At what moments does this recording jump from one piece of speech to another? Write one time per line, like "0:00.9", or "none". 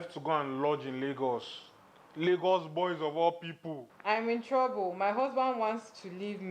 0:04.0